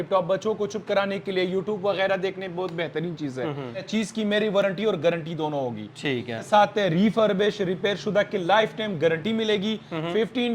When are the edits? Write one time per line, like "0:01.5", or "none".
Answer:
0:03.9
0:06.4

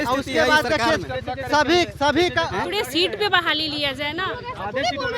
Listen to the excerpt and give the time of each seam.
0:02.7

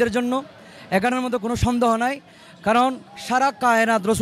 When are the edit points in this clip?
none

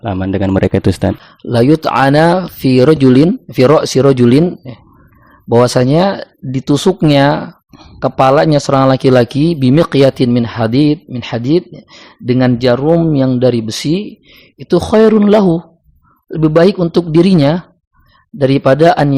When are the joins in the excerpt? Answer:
0:01.3

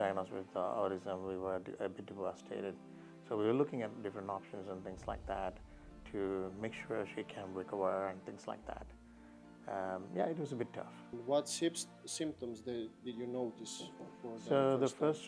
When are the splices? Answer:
none

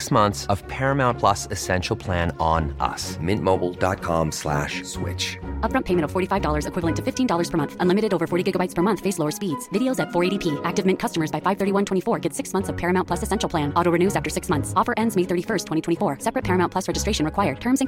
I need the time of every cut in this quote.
none

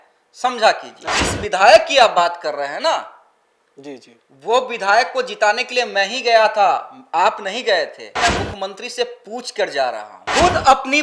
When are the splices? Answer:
0:01.1
0:08.1
0:10.2

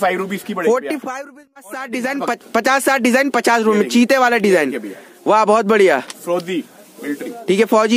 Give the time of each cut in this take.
0:01.2

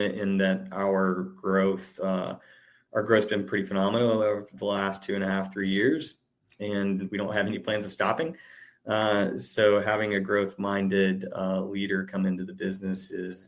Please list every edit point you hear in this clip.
none

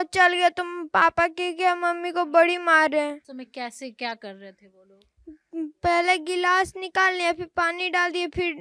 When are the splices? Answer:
none

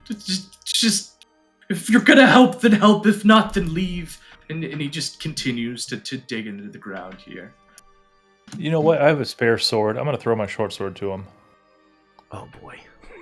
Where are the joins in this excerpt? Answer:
none

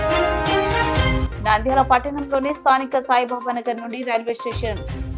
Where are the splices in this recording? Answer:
0:01.2

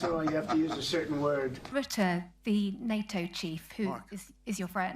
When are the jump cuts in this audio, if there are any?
0:01.7

